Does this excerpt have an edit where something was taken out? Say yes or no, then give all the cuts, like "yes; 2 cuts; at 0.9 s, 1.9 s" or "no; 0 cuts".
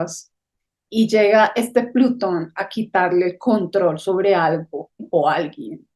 yes; 1 cut; at 5.0 s